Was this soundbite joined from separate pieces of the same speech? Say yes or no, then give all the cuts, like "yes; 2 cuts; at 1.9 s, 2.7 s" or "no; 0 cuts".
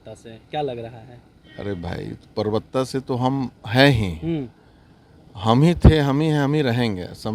no; 0 cuts